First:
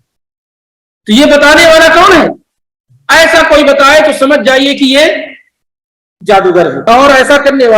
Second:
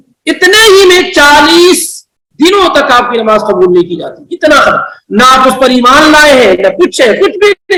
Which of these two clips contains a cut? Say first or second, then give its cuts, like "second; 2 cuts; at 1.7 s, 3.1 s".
first; 1 cut; at 6.9 s